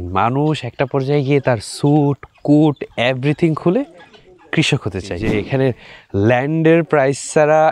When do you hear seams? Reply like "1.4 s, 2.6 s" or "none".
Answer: 5.2 s

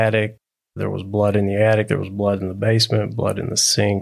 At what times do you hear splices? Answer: none

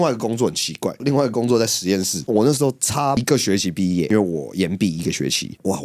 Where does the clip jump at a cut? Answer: 2.3 s

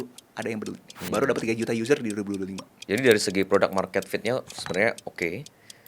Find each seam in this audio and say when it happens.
2.8 s

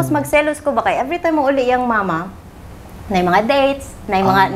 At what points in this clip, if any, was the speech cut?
none

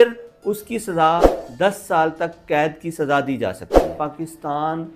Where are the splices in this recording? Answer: 1.4 s, 4.0 s

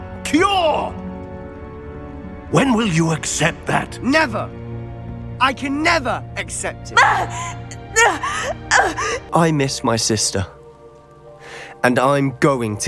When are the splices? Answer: 9.2 s

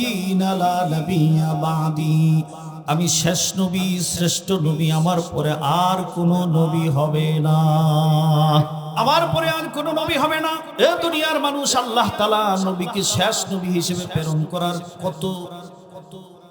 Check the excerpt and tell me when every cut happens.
8.8 s, 10.6 s

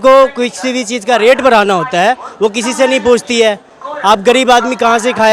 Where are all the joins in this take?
none

